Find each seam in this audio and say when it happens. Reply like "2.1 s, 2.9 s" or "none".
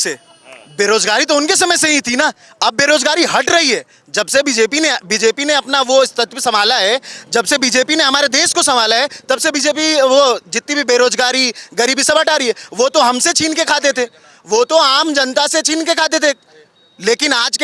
none